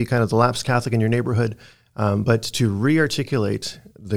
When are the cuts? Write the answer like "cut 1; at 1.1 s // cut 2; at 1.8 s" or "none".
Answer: none